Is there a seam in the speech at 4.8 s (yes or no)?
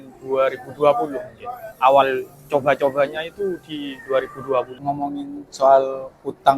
yes